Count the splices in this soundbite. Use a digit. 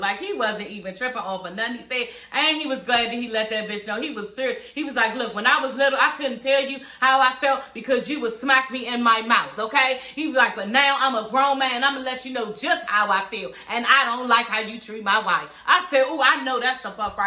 0